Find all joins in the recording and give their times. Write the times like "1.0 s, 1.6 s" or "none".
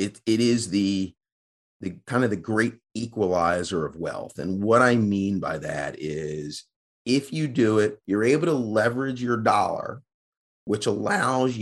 8.0 s